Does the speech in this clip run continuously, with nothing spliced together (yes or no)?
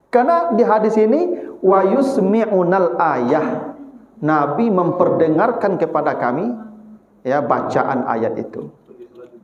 yes